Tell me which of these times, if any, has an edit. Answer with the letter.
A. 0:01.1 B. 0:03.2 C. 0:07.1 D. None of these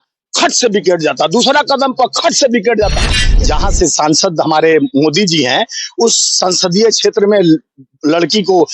B